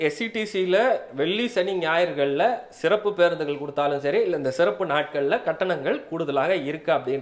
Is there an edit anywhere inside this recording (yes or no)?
no